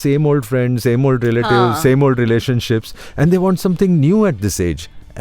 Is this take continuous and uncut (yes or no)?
yes